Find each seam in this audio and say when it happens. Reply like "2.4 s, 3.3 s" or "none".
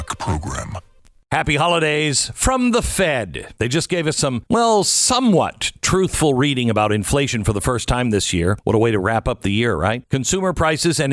1.2 s